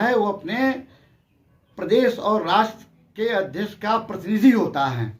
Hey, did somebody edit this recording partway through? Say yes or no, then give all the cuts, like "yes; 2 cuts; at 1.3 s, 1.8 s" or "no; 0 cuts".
no; 0 cuts